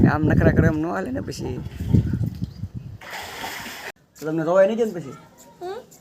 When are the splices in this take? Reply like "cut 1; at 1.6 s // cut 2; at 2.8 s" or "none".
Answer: cut 1; at 3.9 s